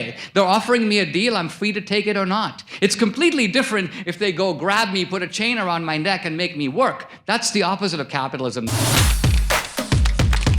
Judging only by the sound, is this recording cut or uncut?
cut